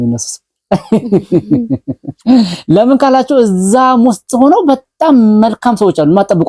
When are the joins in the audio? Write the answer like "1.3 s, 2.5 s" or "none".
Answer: none